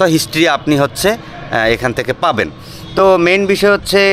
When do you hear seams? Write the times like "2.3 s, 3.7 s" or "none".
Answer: none